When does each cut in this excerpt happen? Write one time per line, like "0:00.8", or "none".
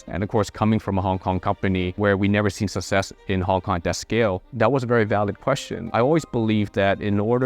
0:04.5
0:05.8